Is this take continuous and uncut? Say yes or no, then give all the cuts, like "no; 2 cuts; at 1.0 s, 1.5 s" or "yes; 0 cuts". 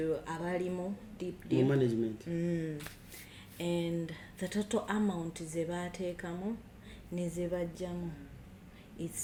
yes; 0 cuts